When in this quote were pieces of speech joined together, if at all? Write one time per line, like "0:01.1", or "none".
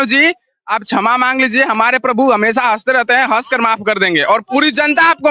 none